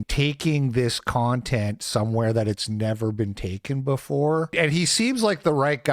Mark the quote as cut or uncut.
cut